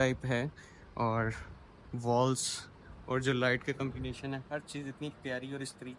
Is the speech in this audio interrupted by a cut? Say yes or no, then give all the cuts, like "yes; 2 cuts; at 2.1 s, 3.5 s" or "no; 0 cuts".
no; 0 cuts